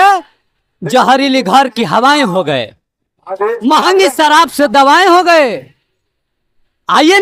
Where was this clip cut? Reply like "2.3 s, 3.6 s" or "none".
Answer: none